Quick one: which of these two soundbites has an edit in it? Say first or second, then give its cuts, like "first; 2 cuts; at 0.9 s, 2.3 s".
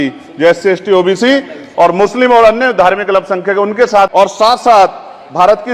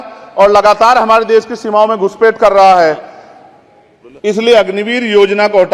first; 1 cut; at 4.1 s